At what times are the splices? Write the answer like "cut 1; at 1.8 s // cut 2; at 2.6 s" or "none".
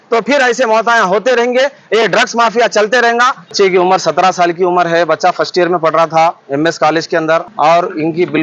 cut 1; at 3.4 s // cut 2; at 7.5 s